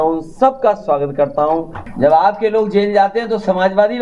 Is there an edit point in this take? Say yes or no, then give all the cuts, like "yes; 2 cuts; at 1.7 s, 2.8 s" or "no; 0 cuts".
yes; 1 cut; at 1.8 s